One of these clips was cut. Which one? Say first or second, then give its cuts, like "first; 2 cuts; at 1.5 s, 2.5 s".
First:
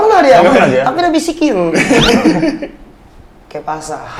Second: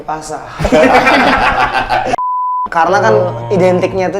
second; 1 cut; at 2.2 s